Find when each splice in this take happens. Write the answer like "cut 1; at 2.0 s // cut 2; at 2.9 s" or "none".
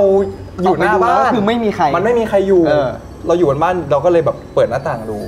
cut 1; at 3.1 s